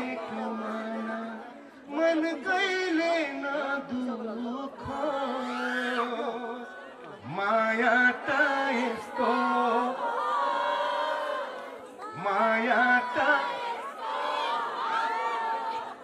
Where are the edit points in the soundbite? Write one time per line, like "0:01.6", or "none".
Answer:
none